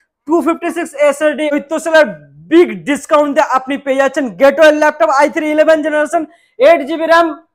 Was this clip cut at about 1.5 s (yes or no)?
yes